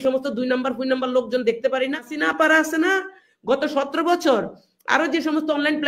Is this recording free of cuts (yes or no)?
no